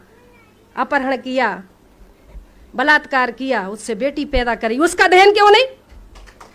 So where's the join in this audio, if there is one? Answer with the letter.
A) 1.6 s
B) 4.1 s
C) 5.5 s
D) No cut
D